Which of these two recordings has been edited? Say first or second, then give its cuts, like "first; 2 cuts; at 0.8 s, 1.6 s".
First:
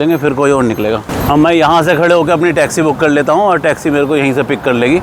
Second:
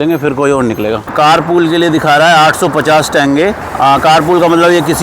second; 1 cut; at 1.1 s